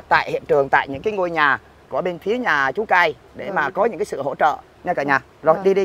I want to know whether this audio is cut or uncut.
uncut